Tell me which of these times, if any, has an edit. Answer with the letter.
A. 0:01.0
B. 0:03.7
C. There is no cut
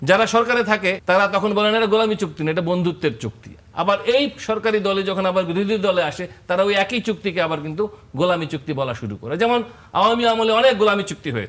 A